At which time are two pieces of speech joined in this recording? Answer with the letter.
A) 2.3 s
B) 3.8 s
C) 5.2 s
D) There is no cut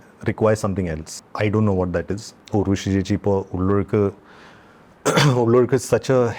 A